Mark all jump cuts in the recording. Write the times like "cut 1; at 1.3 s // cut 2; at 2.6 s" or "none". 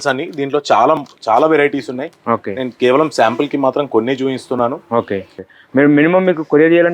cut 1; at 5.4 s